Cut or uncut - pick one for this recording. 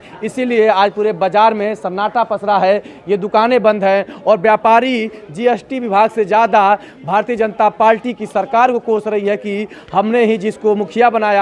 uncut